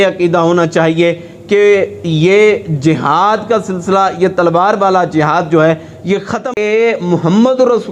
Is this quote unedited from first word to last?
no; 1 cut; at 6.5 s

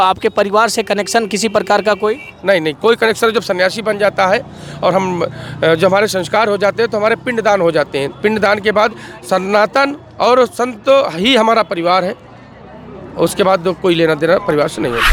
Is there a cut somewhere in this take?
no; 0 cuts

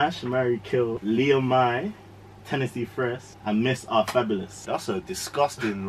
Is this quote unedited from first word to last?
no; 2 cuts; at 1.0 s, 4.5 s

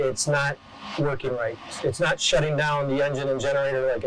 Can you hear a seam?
yes; 1 cut; at 1.6 s

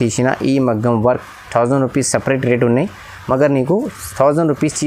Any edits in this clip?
no; 0 cuts

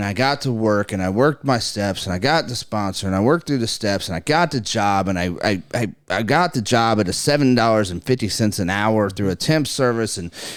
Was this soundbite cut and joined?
no; 0 cuts

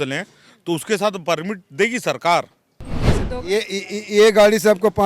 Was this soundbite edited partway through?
yes; 1 cut; at 3.1 s

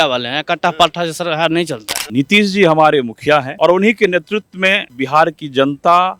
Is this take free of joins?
no; 3 cuts; at 1.9 s, 3.5 s, 4.9 s

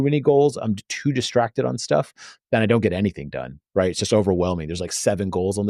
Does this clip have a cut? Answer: no; 0 cuts

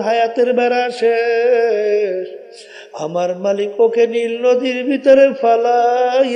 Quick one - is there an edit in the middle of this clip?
no; 0 cuts

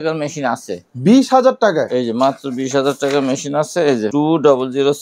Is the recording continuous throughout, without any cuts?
no; 1 cut; at 4.1 s

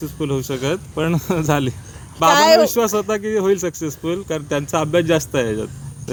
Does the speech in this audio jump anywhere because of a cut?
no; 0 cuts

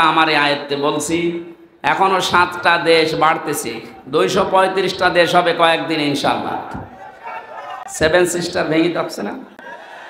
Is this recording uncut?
yes; 0 cuts

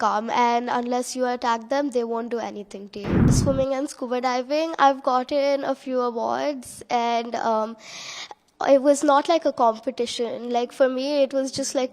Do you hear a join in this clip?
yes; 1 cut; at 3.4 s

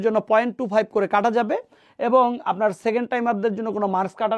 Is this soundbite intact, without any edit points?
yes; 0 cuts

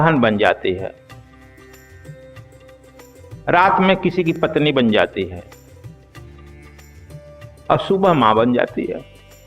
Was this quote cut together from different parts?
no; 0 cuts

